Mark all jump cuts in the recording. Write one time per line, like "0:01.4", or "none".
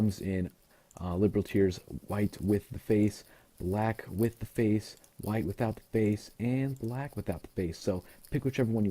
0:06.0